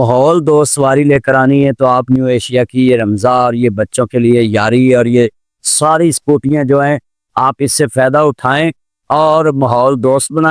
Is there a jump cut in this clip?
no; 0 cuts

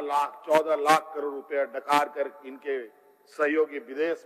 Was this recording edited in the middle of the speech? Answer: no; 0 cuts

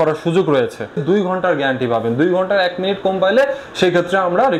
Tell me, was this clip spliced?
yes; 1 cut; at 1.0 s

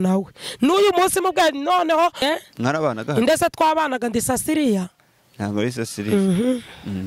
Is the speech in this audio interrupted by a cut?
yes; 1 cut; at 2.2 s

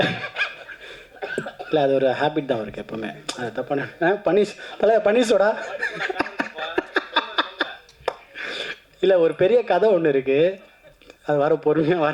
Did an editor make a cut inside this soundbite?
no; 0 cuts

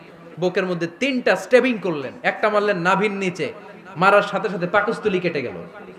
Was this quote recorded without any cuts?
yes; 0 cuts

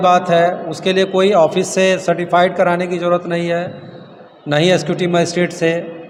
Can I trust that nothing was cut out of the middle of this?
yes; 0 cuts

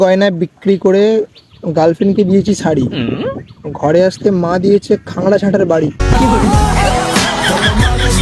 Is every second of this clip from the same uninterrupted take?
yes; 0 cuts

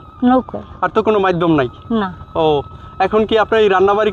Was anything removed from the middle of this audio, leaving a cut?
no; 0 cuts

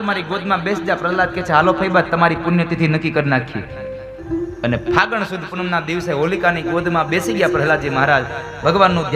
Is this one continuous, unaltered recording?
no; 1 cut; at 4.2 s

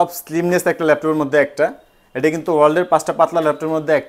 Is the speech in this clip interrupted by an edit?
no; 0 cuts

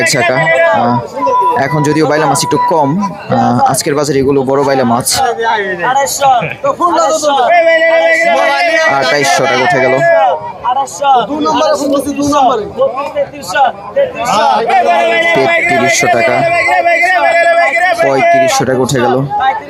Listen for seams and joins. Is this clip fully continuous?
yes; 0 cuts

